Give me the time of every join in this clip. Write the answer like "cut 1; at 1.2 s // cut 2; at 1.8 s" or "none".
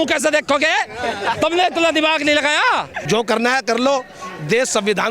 cut 1; at 2.9 s